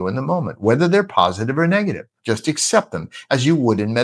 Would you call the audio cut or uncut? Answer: cut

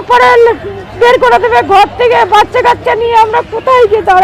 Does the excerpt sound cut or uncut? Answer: uncut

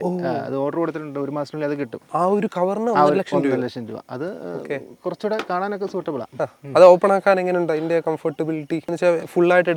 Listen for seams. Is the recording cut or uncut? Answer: uncut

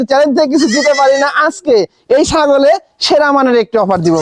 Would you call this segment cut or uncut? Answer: uncut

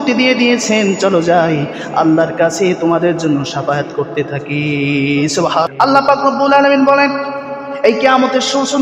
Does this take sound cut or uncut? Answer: cut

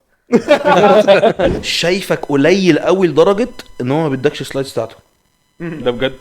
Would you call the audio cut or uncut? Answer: cut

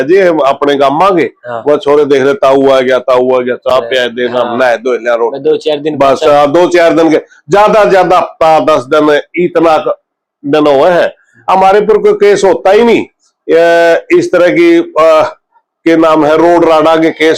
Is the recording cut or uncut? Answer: uncut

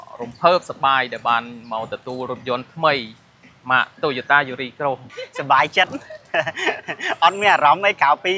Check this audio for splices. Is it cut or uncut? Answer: cut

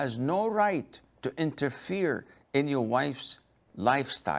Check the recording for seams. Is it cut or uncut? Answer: uncut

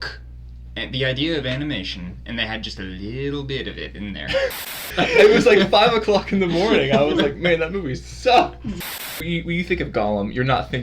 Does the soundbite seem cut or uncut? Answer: cut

